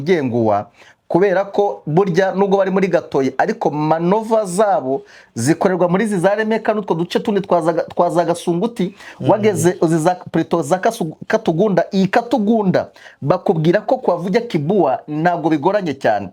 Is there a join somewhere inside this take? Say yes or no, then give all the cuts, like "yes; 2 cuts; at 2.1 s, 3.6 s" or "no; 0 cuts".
no; 0 cuts